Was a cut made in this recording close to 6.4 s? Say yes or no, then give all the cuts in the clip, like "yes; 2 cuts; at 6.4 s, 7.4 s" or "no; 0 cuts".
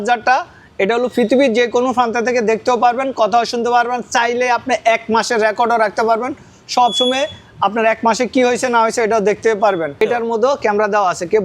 no; 1 cut; at 10.0 s